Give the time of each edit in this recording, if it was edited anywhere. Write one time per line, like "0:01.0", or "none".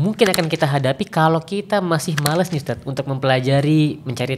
none